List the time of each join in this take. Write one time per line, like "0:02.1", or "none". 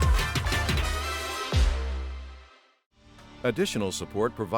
0:03.1